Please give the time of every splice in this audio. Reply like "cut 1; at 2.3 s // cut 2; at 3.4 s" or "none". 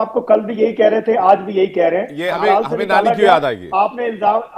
cut 1; at 2.3 s